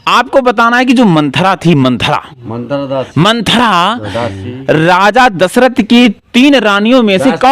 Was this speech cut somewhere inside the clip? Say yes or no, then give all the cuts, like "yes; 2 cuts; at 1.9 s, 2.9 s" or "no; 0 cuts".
no; 0 cuts